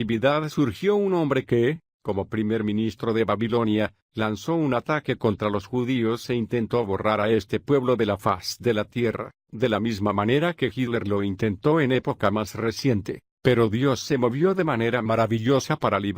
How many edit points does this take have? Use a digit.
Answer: 1